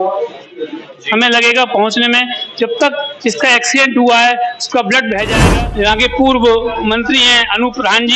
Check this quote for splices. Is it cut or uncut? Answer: cut